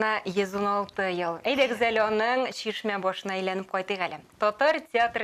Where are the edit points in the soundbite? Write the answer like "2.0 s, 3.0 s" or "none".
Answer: none